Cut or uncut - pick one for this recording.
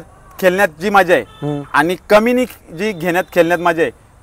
uncut